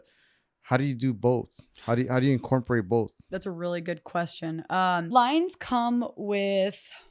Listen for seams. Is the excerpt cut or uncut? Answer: cut